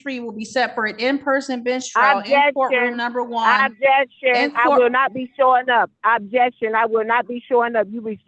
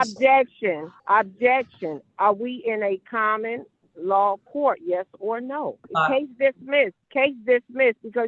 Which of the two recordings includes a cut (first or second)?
second